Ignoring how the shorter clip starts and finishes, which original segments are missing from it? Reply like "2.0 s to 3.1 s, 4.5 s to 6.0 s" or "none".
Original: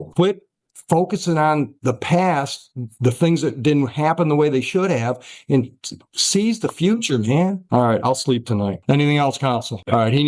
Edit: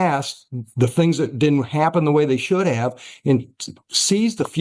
none